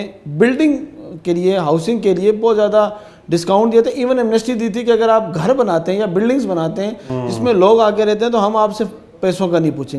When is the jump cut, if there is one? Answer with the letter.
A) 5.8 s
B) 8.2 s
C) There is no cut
C